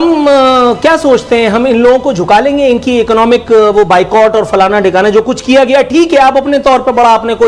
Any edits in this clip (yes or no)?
no